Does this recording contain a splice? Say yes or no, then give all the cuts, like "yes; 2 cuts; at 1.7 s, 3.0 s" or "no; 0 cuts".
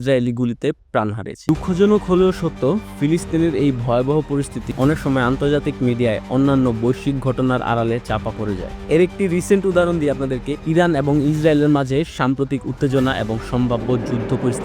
yes; 1 cut; at 1.3 s